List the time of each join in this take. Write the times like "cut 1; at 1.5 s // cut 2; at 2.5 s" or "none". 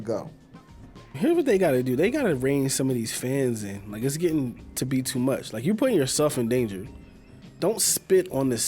cut 1; at 1.1 s